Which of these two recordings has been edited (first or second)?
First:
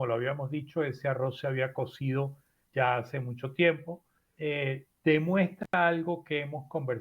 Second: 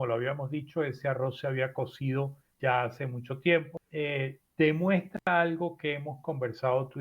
second